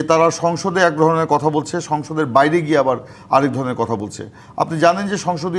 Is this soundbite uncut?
yes; 0 cuts

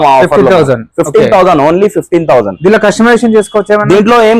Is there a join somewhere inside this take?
no; 0 cuts

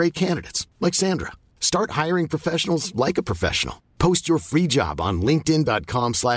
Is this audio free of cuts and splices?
yes; 0 cuts

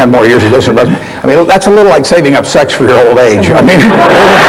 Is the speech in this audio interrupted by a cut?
no; 0 cuts

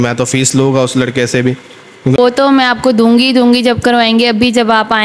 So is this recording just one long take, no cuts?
no; 1 cut; at 2.2 s

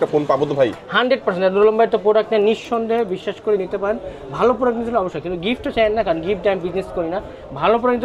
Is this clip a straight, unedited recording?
yes; 0 cuts

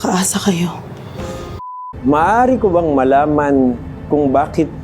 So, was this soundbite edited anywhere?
yes; 1 cut; at 1.6 s

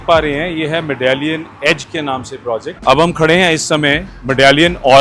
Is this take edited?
yes; 1 cut; at 2.7 s

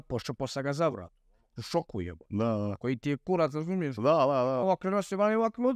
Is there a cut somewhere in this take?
no; 0 cuts

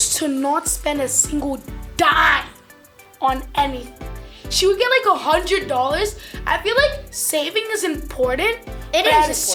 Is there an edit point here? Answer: no; 0 cuts

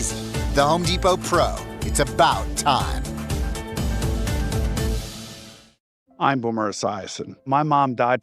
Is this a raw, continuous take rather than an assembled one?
no; 1 cut; at 5.5 s

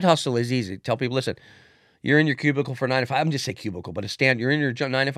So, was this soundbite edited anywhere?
no; 0 cuts

